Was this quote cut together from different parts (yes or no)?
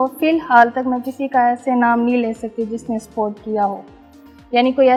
no